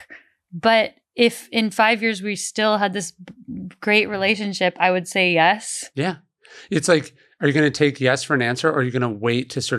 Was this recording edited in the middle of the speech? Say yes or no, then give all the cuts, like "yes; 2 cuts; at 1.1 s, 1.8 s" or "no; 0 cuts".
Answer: no; 0 cuts